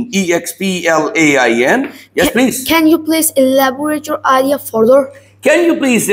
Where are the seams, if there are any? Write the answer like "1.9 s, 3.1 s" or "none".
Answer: none